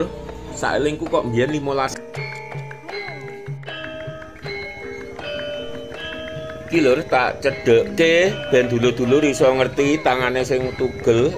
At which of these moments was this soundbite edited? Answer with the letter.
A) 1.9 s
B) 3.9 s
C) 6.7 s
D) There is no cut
A